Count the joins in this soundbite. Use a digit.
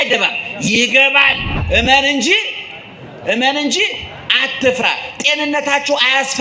1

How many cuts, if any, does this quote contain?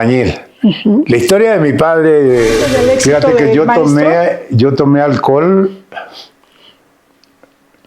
1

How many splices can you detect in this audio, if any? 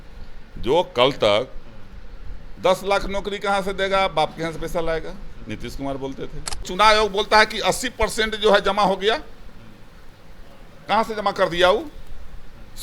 1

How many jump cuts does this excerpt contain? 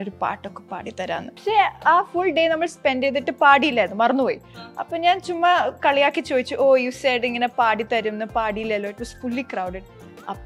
1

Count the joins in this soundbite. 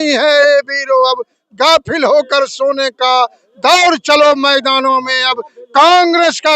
0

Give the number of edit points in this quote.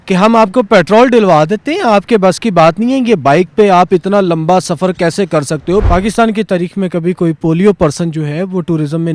1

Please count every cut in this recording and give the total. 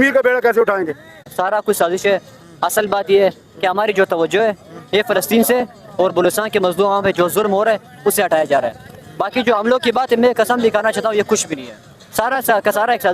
0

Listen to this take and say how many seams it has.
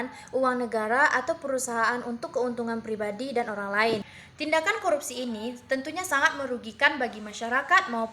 1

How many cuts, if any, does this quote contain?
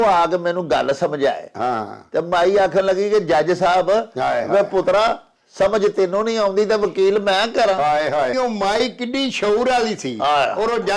1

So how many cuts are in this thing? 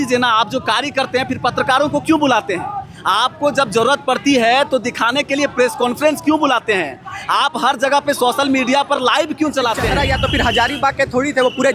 1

